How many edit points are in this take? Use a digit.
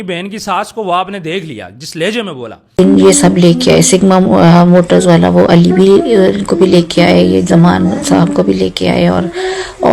1